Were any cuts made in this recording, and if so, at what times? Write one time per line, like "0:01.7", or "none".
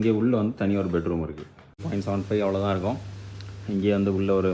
0:01.8